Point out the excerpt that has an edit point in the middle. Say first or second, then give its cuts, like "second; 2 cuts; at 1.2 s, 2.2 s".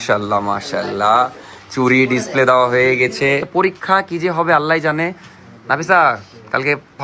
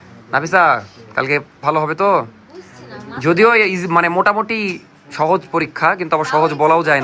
first; 1 cut; at 3.5 s